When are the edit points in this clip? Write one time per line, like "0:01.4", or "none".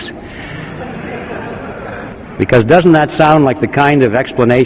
0:01.1